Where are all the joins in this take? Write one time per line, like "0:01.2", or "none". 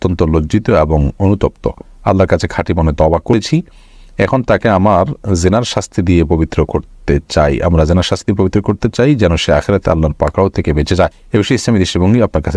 0:03.3
0:11.2